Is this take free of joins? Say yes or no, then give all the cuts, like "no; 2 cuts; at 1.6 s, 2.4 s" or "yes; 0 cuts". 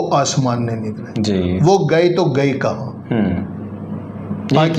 yes; 0 cuts